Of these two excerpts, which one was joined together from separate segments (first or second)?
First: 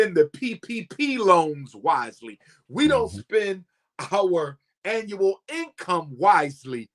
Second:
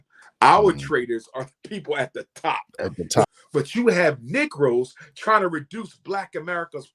second